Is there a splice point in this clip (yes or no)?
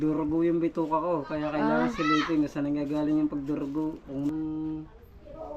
yes